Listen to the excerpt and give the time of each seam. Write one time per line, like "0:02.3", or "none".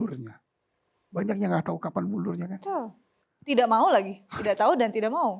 none